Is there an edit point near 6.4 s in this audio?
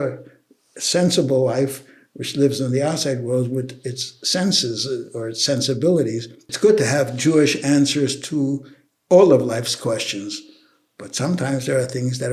yes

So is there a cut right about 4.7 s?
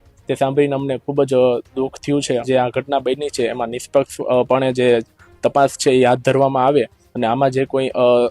no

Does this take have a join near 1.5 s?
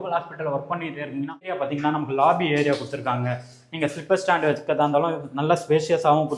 yes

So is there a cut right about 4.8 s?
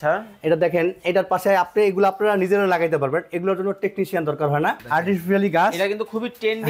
yes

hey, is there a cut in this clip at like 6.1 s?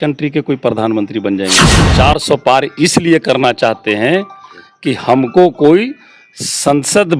no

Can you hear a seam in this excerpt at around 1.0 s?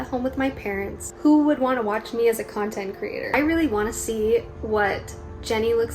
yes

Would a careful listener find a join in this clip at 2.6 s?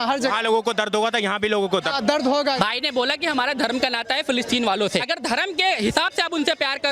yes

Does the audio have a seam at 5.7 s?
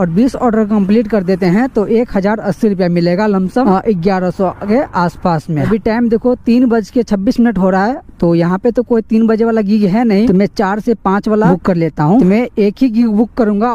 yes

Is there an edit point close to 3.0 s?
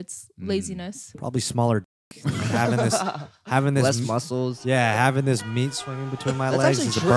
no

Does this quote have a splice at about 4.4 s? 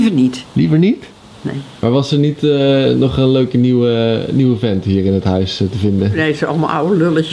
no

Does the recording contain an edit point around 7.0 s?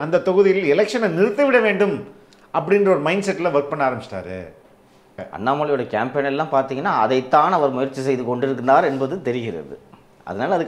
no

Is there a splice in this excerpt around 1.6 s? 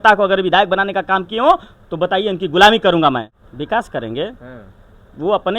no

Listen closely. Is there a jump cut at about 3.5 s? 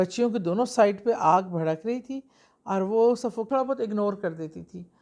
yes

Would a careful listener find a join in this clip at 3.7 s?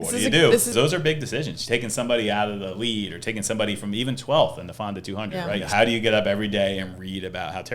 no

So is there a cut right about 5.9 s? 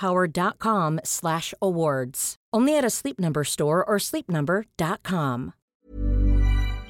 yes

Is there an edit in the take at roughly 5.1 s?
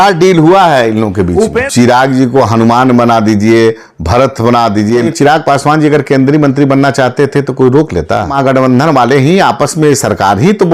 yes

